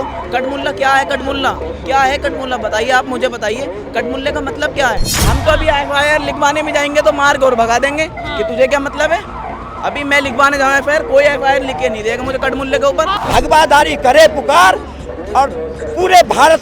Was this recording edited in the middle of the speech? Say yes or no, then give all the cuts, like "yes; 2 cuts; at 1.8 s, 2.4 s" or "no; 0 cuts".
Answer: yes; 2 cuts; at 5.1 s, 13.2 s